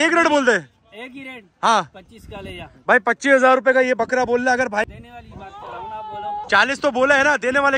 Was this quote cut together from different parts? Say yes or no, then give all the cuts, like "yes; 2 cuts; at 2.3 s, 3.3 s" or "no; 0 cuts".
yes; 1 cut; at 4.8 s